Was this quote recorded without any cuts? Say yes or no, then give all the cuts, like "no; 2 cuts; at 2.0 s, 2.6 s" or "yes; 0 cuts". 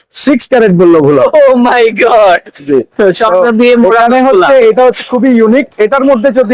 yes; 0 cuts